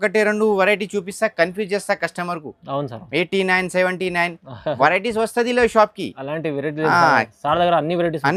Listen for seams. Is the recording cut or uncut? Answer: uncut